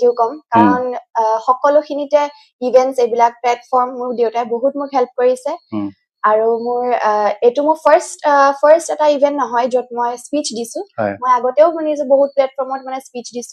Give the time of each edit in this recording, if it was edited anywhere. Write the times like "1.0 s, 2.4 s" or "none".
none